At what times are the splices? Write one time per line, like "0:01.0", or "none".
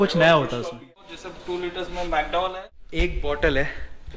0:00.8
0:02.7